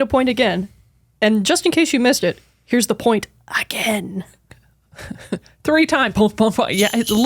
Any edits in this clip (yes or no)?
yes